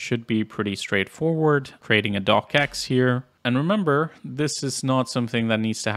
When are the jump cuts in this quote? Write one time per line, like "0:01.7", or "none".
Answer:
0:03.3